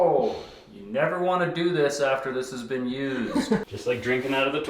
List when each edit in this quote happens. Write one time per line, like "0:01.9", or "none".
0:03.6